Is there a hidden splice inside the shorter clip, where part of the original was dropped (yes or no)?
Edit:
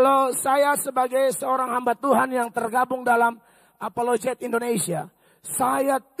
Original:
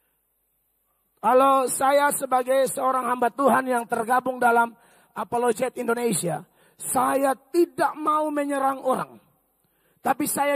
no